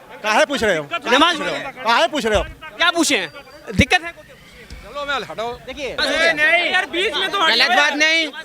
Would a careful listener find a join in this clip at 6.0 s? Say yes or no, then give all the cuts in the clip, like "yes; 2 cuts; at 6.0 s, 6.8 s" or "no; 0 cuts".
yes; 1 cut; at 6.0 s